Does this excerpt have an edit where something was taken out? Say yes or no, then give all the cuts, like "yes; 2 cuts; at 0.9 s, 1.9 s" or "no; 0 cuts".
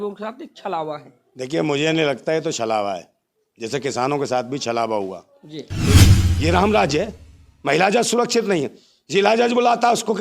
yes; 1 cut; at 6.0 s